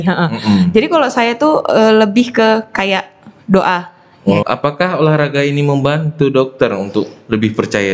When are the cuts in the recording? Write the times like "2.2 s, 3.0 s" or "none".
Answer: 4.4 s